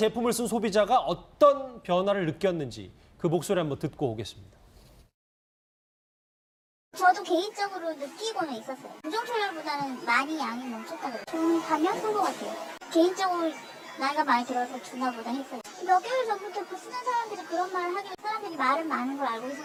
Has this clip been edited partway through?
no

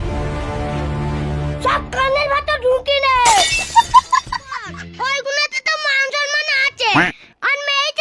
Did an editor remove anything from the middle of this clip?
yes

